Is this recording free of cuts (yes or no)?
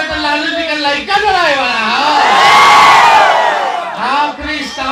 yes